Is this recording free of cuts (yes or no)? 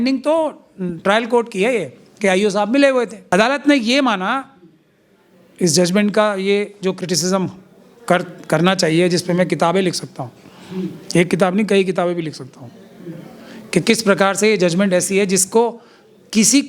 no